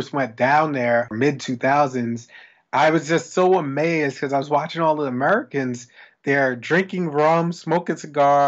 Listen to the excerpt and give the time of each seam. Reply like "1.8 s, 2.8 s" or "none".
1.1 s